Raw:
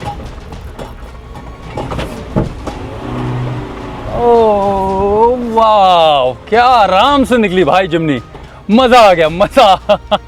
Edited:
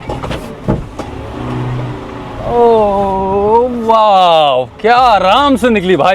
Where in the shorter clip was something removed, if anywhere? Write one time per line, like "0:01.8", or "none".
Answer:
none

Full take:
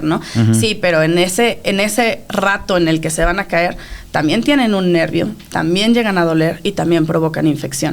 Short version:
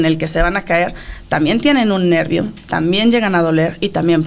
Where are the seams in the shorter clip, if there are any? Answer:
none

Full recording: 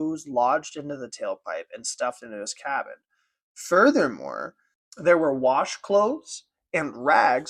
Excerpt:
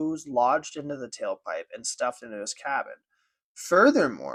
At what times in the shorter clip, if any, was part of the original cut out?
none

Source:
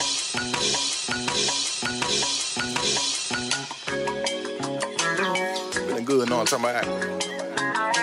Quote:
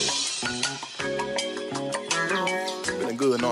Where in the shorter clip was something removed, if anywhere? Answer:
none

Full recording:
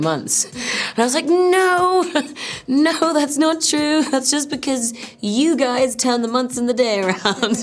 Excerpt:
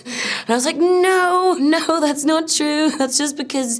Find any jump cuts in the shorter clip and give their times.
0:01.6

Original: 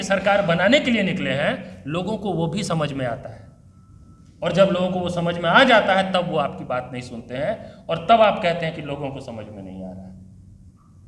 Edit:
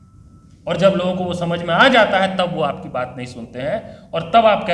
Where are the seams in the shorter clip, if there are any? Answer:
none

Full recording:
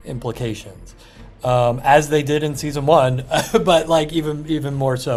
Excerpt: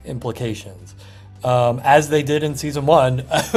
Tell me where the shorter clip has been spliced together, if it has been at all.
none

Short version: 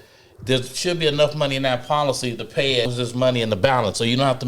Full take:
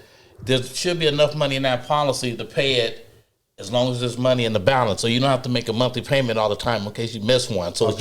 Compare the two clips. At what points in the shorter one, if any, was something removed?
0:02.9

